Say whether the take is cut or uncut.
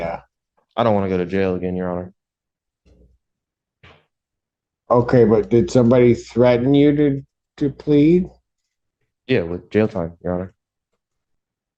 uncut